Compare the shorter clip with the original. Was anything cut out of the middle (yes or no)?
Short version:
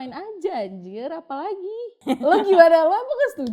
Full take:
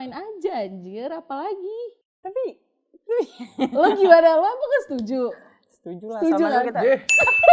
yes